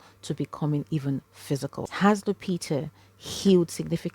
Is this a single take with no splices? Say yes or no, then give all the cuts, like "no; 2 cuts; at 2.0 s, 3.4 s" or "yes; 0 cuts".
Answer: no; 1 cut; at 1.8 s